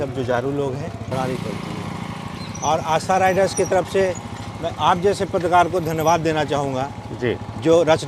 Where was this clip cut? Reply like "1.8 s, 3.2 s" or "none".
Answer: 1.1 s